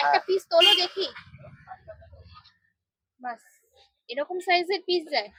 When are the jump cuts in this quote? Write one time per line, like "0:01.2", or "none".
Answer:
none